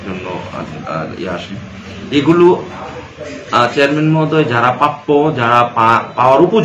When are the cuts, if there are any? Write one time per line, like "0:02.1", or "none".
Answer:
none